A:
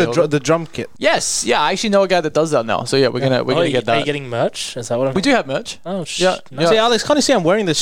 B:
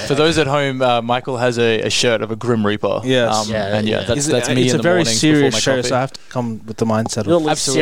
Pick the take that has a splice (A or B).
B